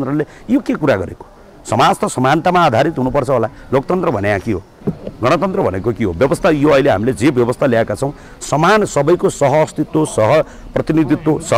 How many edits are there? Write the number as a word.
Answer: zero